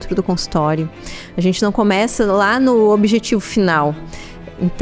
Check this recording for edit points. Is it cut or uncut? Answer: uncut